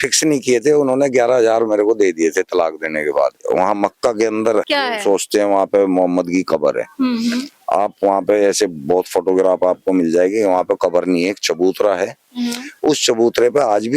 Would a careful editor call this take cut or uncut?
cut